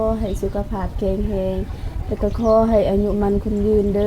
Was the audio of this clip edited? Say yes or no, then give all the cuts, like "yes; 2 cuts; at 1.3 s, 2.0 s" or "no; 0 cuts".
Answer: no; 0 cuts